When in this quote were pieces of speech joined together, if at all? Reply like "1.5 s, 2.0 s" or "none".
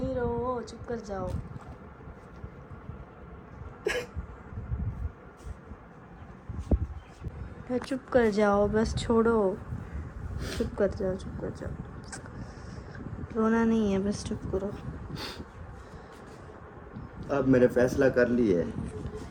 none